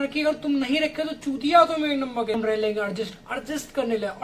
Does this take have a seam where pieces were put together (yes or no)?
yes